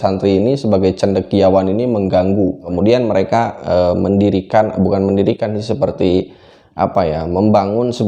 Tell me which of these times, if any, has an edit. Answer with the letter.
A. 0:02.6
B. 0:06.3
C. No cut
A